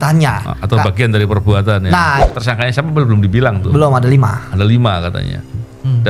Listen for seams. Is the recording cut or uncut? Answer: cut